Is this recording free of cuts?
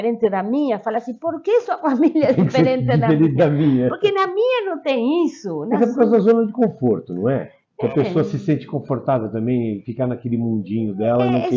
yes; 0 cuts

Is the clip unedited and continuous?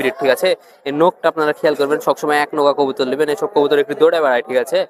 yes; 0 cuts

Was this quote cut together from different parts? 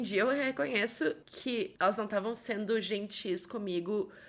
yes; 1 cut; at 1.5 s

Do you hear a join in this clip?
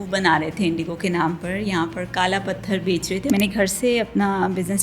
yes; 1 cut; at 3.2 s

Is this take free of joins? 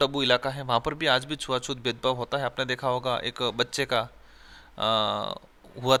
yes; 0 cuts

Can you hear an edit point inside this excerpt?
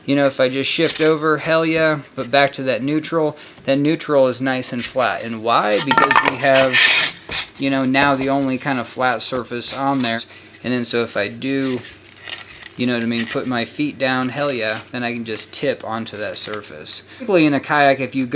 yes; 2 cuts; at 10.2 s, 17.3 s

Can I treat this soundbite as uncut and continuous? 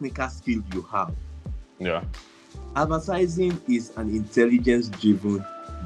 yes; 0 cuts

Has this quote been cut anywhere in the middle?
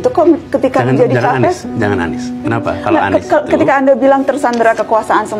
no; 0 cuts

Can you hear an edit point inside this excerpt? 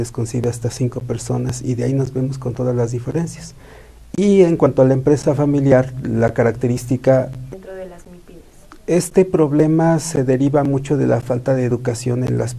no; 0 cuts

